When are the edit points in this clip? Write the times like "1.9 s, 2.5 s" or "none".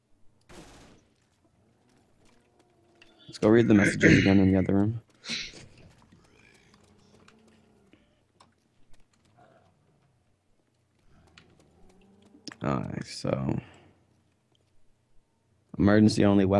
2.3 s